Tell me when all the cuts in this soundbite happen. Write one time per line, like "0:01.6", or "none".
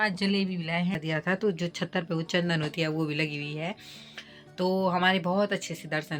0:01.0